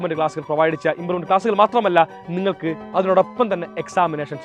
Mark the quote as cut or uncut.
uncut